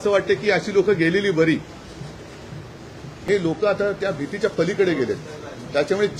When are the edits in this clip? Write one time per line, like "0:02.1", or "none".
0:03.2